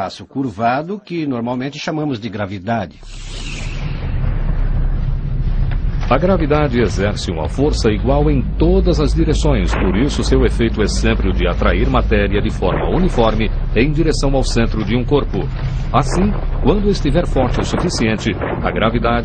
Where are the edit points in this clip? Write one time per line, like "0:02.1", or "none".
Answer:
0:02.7